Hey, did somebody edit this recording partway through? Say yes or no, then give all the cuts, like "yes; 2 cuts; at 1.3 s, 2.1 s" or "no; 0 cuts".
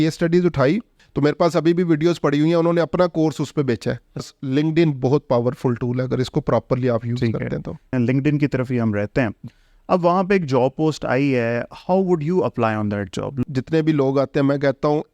yes; 4 cuts; at 1.0 s, 4.4 s, 7.9 s, 13.4 s